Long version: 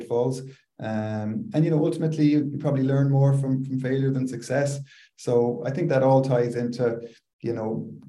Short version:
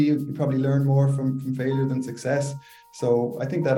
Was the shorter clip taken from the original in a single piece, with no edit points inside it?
yes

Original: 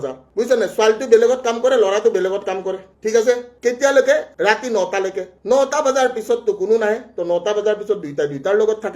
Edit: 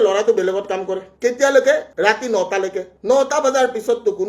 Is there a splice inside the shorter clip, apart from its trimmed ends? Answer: yes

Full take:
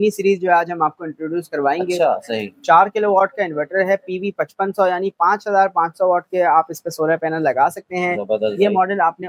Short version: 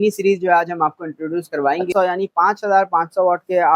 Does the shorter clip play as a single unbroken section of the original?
no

